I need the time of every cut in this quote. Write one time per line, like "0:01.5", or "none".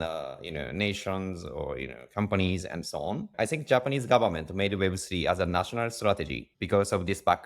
0:03.3